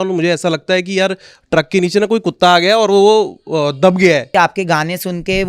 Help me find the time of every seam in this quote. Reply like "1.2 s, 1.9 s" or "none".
4.3 s